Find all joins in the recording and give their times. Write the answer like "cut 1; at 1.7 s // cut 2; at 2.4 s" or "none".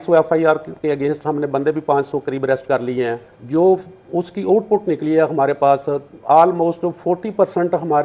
cut 1; at 3.3 s